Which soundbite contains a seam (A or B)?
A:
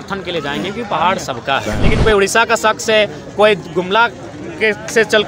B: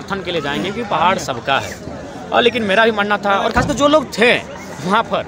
A